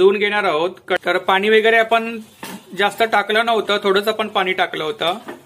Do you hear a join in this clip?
yes; 1 cut; at 1.0 s

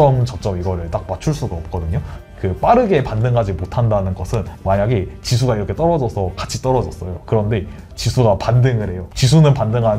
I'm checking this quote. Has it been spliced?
yes; 1 cut; at 2.2 s

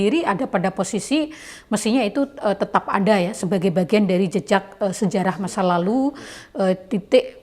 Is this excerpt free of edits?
yes; 0 cuts

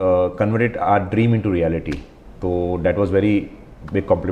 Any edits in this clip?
no; 0 cuts

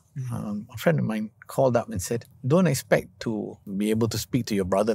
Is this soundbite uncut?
no; 2 cuts; at 2.3 s, 3.7 s

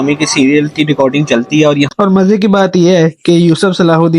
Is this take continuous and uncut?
no; 1 cut; at 1.9 s

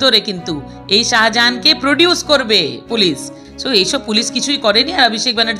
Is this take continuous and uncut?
no; 1 cut; at 3.4 s

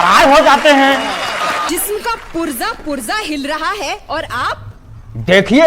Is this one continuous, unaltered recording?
no; 1 cut; at 1.7 s

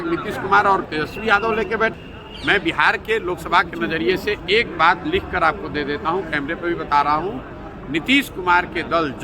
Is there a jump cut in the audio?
yes; 1 cut; at 1.9 s

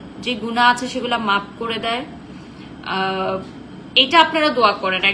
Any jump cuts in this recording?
no; 0 cuts

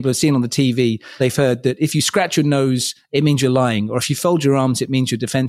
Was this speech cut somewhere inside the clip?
yes; 1 cut; at 1.2 s

